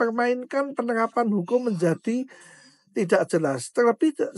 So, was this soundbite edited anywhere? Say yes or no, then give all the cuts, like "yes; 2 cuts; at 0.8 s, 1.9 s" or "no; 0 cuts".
no; 0 cuts